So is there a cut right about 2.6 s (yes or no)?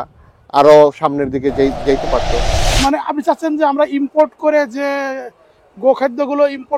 yes